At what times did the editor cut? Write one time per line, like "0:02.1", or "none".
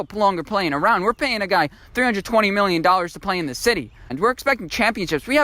0:04.1